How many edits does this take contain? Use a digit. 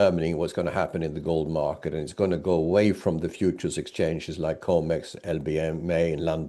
0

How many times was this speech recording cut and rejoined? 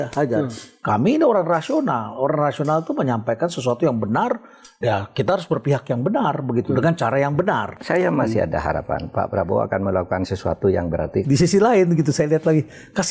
2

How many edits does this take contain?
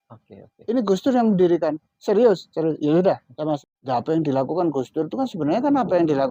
1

